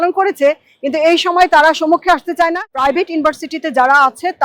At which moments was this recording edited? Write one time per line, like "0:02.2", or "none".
0:02.7